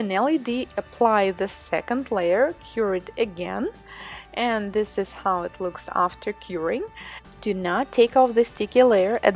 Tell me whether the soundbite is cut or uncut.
uncut